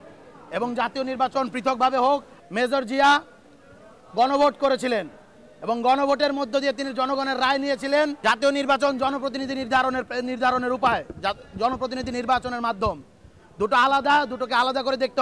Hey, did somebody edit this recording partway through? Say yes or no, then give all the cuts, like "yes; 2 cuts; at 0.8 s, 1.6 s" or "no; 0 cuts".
yes; 2 cuts; at 2.4 s, 8.2 s